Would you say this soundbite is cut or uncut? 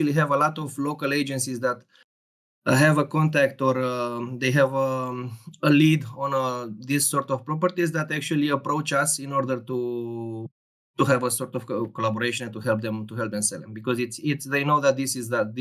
uncut